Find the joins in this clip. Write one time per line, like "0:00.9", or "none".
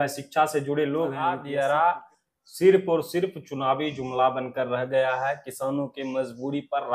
0:01.2